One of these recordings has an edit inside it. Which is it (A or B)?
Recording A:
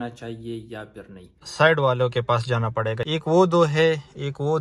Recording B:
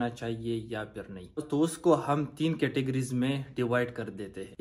A